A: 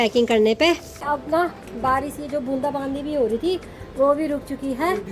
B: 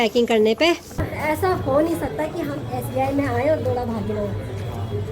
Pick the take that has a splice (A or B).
B